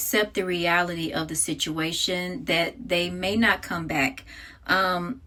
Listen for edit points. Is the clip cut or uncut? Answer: uncut